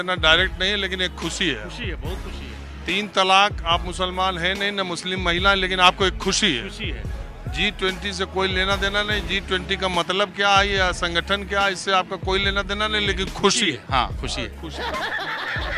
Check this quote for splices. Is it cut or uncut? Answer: uncut